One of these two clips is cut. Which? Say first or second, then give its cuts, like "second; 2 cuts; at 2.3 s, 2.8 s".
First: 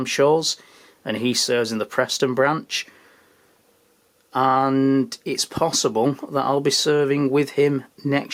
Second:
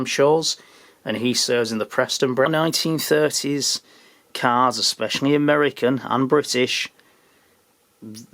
second; 1 cut; at 2.5 s